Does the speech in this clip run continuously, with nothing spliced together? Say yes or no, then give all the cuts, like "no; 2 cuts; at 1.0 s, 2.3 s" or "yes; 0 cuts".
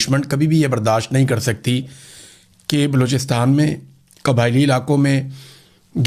yes; 0 cuts